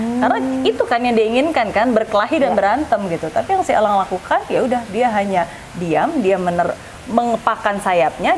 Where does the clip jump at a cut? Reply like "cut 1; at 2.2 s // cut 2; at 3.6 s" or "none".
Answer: none